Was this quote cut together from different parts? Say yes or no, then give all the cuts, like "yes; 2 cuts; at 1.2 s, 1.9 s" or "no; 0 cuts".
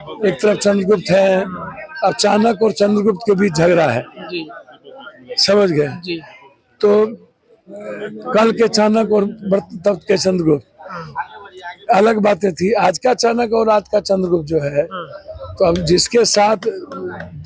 no; 0 cuts